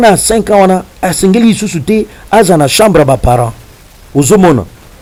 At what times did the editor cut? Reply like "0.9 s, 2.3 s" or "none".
none